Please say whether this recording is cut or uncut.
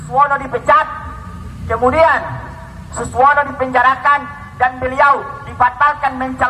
uncut